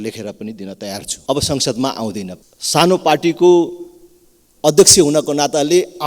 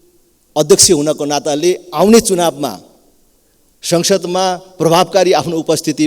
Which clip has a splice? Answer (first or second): first